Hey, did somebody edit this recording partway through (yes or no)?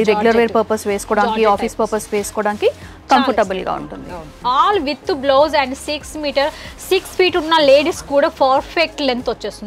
yes